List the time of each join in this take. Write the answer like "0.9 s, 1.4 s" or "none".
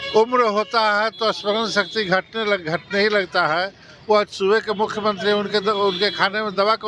none